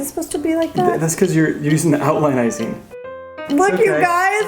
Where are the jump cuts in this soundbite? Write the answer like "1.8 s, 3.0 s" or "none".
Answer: 3.0 s